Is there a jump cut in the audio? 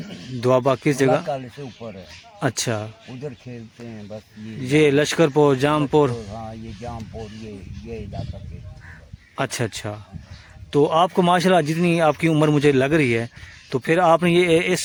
no; 0 cuts

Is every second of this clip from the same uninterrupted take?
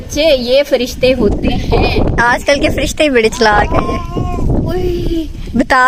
yes; 0 cuts

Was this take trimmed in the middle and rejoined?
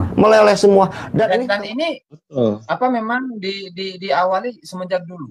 yes; 1 cut; at 1.4 s

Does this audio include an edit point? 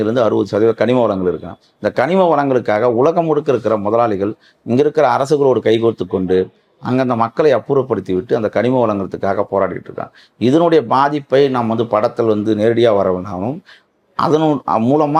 no; 0 cuts

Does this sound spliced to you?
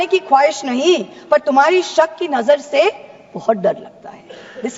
no; 0 cuts

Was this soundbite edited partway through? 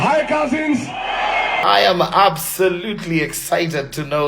yes; 1 cut; at 1.6 s

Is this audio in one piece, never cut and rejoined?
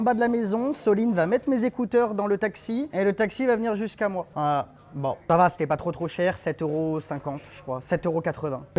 yes; 0 cuts

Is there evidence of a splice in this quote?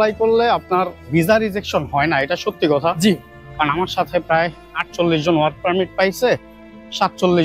no; 0 cuts

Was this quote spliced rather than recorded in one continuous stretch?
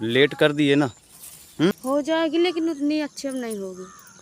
yes; 1 cut; at 1.8 s

